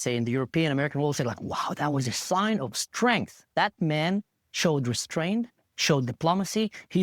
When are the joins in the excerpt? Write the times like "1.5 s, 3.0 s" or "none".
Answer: none